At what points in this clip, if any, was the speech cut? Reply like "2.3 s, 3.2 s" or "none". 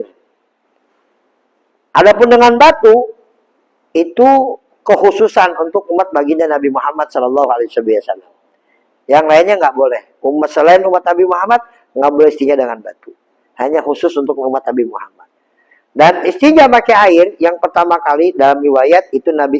none